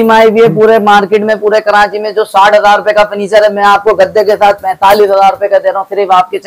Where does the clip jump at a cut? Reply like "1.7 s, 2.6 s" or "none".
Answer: none